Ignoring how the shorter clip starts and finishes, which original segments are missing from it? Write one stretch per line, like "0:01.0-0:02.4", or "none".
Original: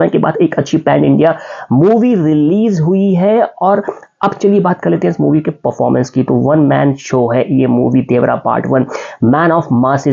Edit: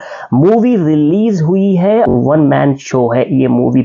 0:03.5-0:06.3

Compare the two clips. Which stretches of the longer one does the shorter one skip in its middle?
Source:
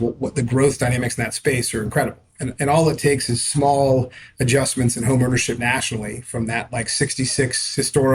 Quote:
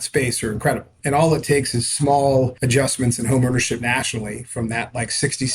0:02.2-0:02.5
0:04.1-0:04.4

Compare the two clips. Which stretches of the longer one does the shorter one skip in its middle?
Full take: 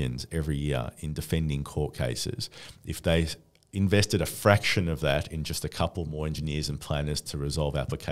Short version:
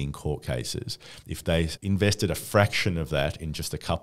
0:02.9-0:03.3

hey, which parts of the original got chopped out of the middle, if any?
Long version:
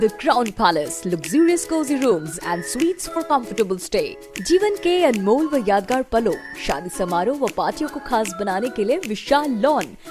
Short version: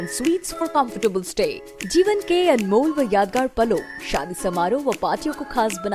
none

